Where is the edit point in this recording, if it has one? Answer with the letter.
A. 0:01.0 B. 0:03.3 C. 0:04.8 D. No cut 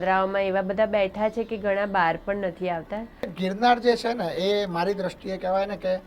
B